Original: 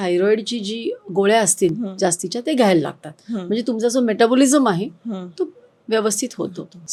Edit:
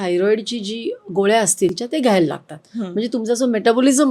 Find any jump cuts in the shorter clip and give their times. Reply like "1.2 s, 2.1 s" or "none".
1.8 s